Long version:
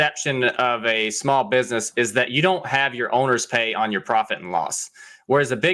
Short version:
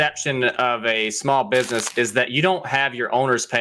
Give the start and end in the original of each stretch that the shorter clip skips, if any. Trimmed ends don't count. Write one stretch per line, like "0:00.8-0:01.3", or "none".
none